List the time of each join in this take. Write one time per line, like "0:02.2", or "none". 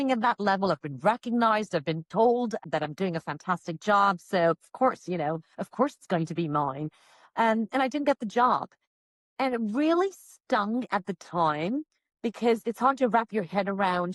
none